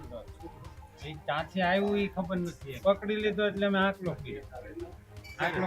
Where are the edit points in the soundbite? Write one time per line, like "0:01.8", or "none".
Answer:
0:02.8